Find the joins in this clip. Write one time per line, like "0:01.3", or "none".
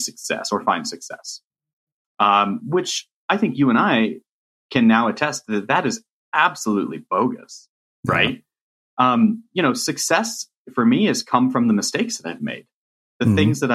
none

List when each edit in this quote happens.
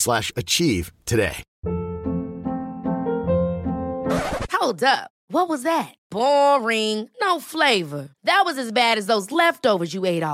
0:01.5

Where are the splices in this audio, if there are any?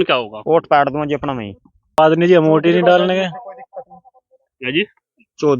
0:02.0

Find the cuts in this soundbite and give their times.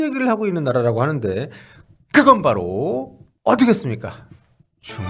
none

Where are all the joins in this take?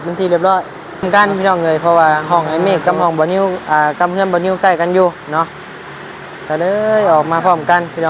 0:01.1

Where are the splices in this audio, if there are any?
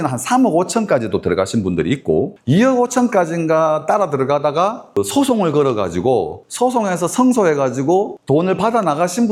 none

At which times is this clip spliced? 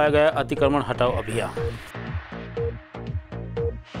0:01.5

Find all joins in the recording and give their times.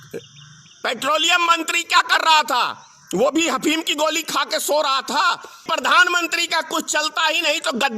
0:05.6

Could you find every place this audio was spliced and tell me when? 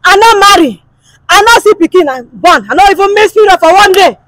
none

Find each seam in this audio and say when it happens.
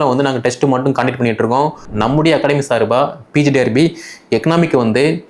0:01.9

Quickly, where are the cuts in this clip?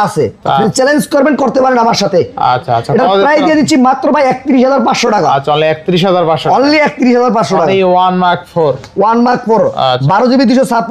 none

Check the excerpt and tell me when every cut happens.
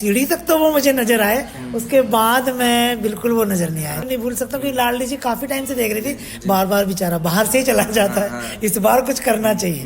0:04.5

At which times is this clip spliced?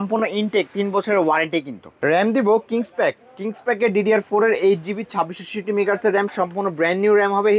0:01.8

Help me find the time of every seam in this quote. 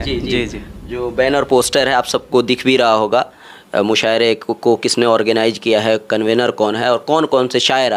none

